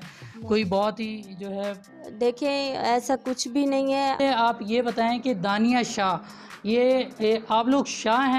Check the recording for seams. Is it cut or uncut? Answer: cut